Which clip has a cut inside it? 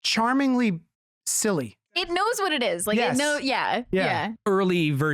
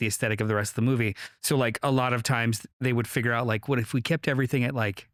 first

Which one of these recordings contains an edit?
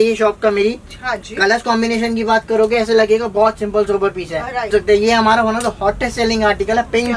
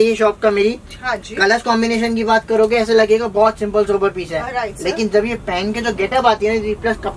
first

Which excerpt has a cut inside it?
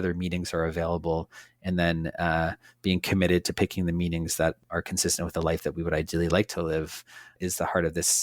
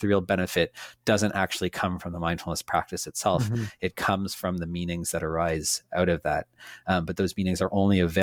first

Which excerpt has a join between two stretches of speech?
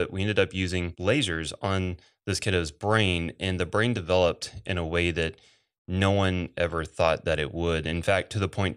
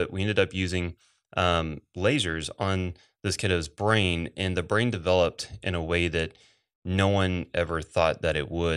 first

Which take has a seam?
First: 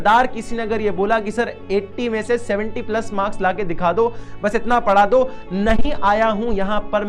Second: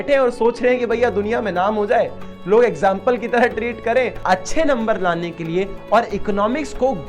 second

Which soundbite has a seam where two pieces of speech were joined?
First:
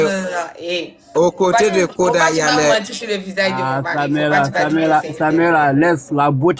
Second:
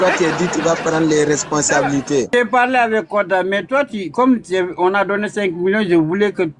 second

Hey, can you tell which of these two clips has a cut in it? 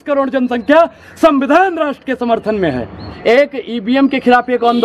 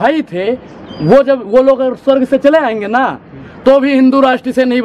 first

